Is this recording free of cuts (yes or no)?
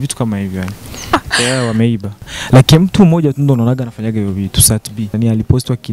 no